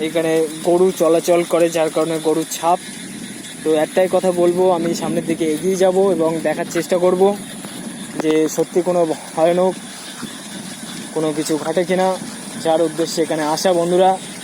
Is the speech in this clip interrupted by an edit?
no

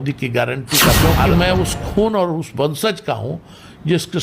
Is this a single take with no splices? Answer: no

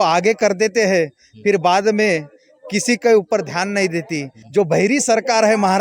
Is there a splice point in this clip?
yes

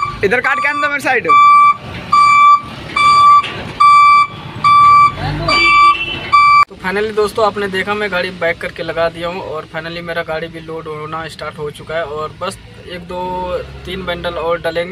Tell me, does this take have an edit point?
no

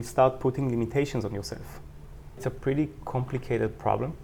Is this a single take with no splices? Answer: no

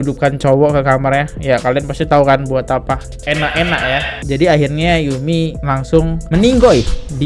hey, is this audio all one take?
no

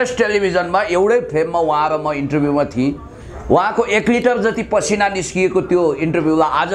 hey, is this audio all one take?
yes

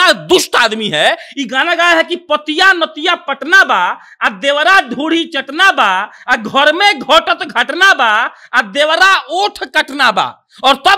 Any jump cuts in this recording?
no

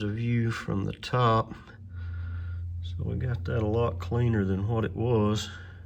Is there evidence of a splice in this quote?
no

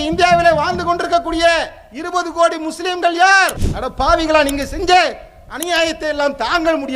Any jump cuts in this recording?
no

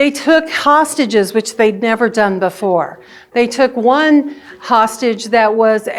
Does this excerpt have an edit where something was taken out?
no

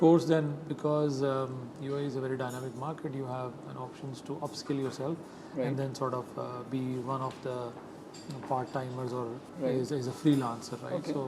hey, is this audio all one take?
yes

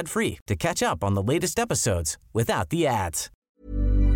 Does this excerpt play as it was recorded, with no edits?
no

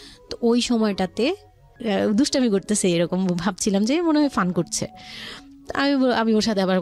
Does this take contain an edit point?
yes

